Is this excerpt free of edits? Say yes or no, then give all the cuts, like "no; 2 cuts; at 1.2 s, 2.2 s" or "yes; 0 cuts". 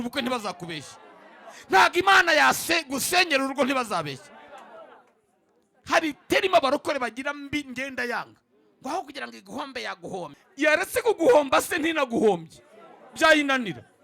no; 1 cut; at 10.4 s